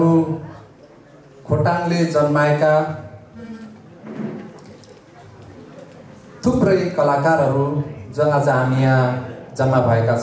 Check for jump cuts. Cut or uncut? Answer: uncut